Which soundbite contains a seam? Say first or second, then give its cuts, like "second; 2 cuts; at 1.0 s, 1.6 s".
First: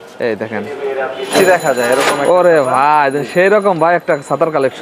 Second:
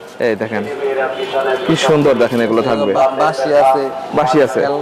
first; 1 cut; at 1.3 s